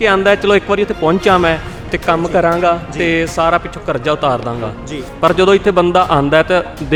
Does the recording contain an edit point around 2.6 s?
no; 0 cuts

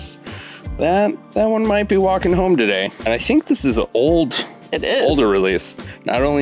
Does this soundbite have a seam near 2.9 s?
yes; 1 cut; at 2.9 s

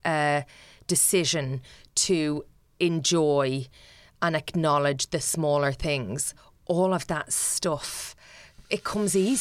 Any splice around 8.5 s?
yes; 1 cut; at 8.5 s

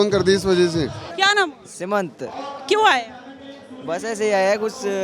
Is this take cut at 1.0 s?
yes; 1 cut; at 1.0 s

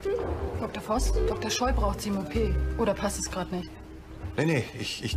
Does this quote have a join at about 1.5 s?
yes; 1 cut; at 1.5 s

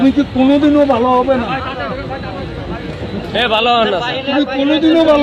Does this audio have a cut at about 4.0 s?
no; 0 cuts

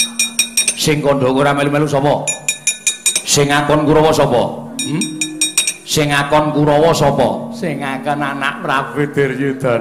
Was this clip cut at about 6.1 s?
no; 1 cut; at 0.9 s

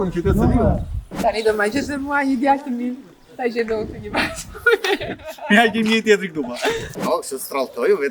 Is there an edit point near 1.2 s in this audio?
yes; 2 cuts; at 1.2 s, 6.9 s

